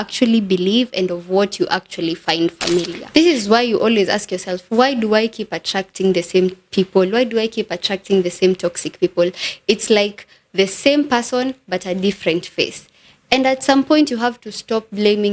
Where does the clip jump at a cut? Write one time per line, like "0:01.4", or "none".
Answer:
0:03.0